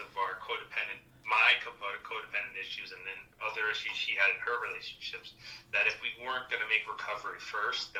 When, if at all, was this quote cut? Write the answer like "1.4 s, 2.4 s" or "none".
none